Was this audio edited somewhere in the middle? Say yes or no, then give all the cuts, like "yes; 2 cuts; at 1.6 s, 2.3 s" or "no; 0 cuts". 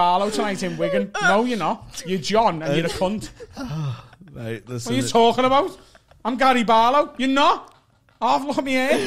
no; 0 cuts